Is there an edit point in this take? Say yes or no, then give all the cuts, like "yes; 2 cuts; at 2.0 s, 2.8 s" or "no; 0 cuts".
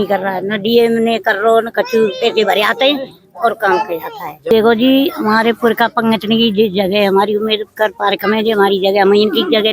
yes; 1 cut; at 4.5 s